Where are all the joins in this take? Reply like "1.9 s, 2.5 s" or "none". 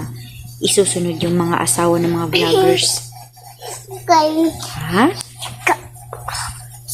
none